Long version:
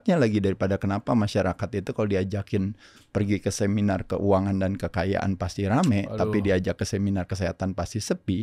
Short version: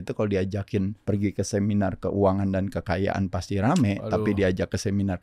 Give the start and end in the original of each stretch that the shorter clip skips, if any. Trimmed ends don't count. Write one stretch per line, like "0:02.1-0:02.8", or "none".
0:02.8-0:03.0